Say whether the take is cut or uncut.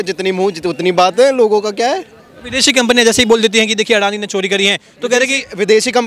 uncut